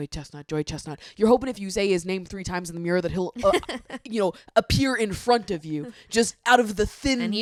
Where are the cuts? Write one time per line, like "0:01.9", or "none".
none